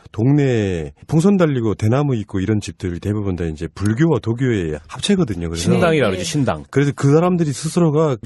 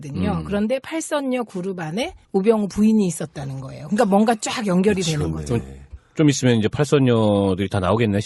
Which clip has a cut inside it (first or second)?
second